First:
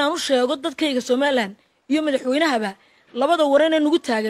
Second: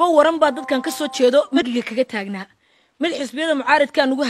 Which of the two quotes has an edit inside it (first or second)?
second